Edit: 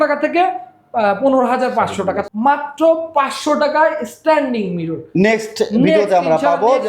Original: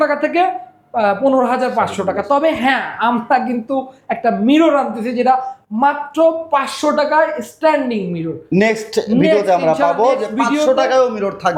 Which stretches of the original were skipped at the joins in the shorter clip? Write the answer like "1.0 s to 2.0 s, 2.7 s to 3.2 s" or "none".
2.2 s to 5.6 s